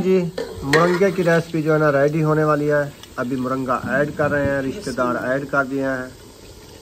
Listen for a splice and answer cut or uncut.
uncut